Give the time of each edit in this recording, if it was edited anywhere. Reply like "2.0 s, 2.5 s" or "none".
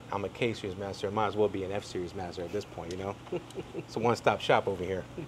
none